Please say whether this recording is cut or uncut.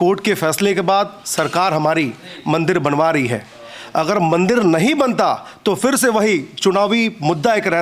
uncut